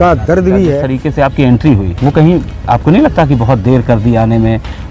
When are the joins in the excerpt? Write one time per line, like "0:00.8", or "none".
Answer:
0:00.9
0:01.9